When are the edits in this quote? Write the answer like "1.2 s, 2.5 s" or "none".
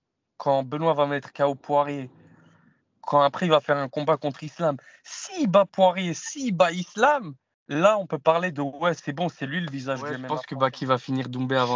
10.4 s